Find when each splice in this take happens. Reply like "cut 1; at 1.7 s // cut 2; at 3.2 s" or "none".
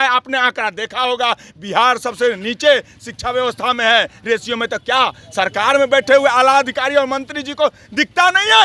none

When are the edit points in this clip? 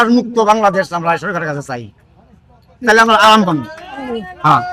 none

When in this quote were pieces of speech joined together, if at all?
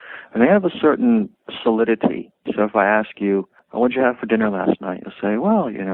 cut 1; at 1.4 s // cut 2; at 2.4 s // cut 3; at 3.6 s

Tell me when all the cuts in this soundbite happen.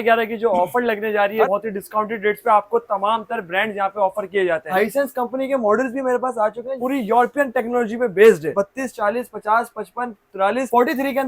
cut 1; at 1.5 s // cut 2; at 4.7 s // cut 3; at 8.5 s

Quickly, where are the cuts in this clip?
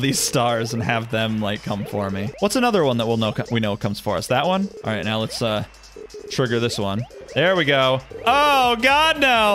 cut 1; at 2.3 s // cut 2; at 4.8 s // cut 3; at 7.2 s // cut 4; at 8.1 s

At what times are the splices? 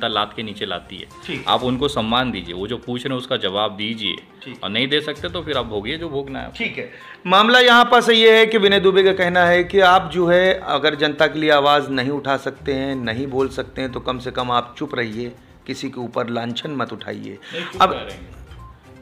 none

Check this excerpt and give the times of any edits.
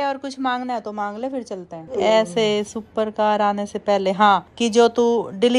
cut 1; at 1.8 s

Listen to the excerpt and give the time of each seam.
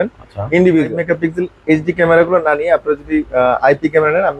cut 1; at 1.0 s

